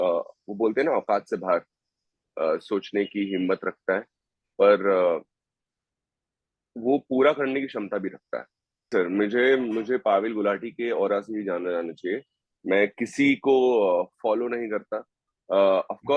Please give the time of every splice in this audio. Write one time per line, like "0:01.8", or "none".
0:08.9